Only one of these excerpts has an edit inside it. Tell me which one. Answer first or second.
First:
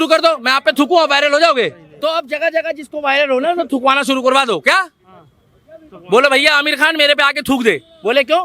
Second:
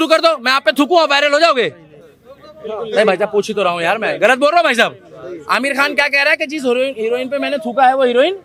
first